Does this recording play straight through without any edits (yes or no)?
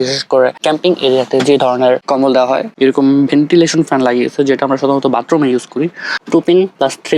no